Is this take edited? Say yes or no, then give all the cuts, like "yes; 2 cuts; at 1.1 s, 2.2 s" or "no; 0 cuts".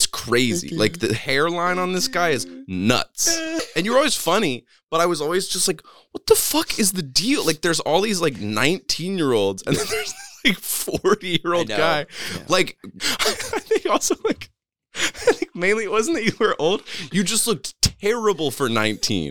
yes; 2 cuts; at 3.7 s, 12.9 s